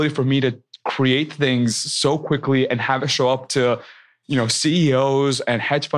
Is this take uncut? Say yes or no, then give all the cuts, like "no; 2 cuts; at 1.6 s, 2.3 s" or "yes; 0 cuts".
no; 1 cut; at 2.8 s